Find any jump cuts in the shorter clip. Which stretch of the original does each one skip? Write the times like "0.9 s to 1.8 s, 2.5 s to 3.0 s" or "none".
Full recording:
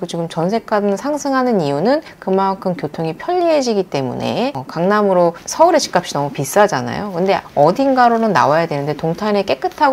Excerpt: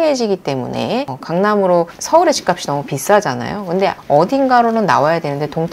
none